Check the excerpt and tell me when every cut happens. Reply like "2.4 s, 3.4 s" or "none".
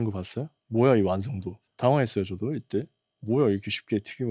none